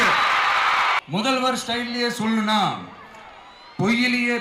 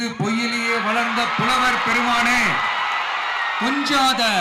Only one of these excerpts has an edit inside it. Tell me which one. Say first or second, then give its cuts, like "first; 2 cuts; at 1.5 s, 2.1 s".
first; 1 cut; at 1.0 s